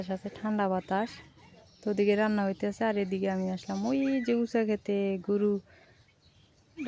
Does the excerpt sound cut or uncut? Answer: uncut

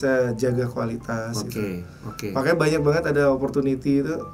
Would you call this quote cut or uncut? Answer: uncut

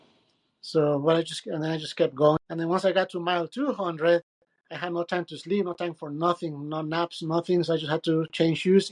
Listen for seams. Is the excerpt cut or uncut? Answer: cut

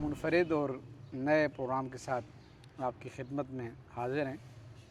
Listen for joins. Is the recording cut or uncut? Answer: uncut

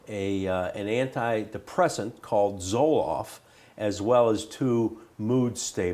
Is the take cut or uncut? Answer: uncut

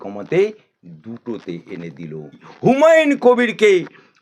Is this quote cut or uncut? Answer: cut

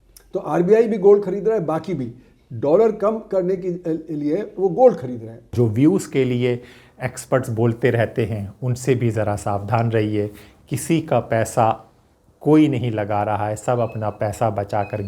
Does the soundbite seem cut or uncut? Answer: cut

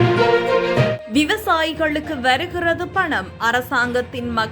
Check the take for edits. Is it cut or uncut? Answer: cut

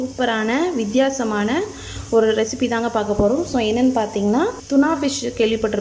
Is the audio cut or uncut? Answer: cut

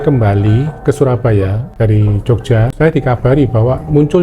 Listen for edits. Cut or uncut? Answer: cut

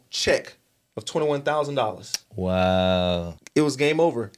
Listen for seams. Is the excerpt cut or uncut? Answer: cut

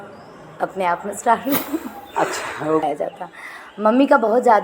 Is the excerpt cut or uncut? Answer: cut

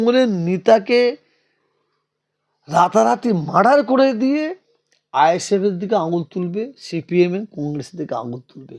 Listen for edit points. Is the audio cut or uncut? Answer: uncut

